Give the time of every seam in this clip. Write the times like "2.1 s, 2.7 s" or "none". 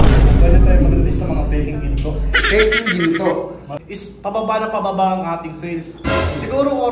3.7 s